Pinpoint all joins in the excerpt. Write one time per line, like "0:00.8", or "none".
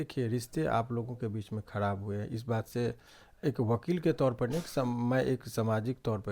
none